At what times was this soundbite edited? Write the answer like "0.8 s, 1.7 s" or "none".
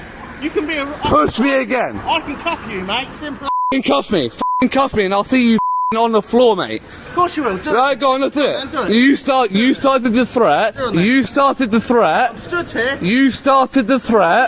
none